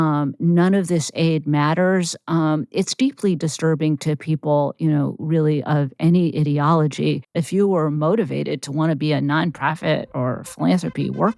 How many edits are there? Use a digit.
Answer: 1